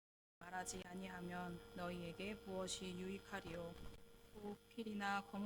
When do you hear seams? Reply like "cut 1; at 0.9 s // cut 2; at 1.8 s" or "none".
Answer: cut 1; at 3.9 s